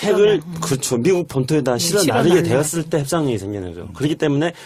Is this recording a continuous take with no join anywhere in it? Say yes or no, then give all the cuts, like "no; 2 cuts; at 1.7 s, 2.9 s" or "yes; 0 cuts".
yes; 0 cuts